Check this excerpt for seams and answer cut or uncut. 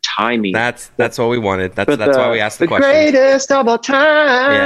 uncut